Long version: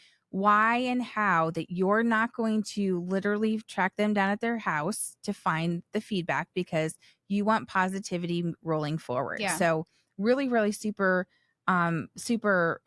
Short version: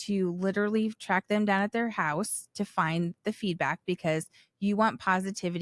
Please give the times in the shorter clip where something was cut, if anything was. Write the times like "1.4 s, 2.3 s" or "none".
none